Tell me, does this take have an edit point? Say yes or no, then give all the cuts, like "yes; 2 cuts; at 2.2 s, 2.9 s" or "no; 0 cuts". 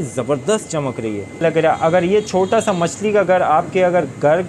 yes; 1 cut; at 1.4 s